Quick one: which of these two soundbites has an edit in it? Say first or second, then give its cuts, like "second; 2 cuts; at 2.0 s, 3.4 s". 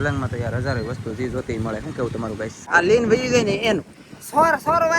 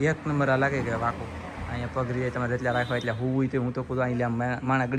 first; 1 cut; at 2.6 s